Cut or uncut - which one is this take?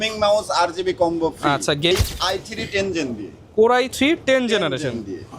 cut